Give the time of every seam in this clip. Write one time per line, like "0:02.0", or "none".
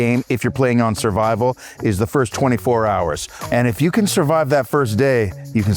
0:03.3